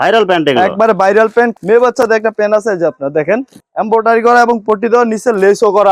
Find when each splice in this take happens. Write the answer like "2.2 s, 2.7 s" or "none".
1.5 s